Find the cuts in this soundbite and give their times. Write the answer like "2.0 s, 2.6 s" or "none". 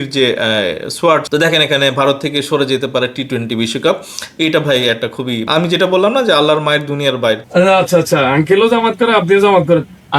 1.2 s, 7.4 s